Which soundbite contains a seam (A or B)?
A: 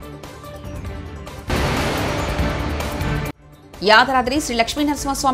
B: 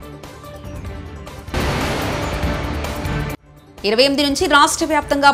B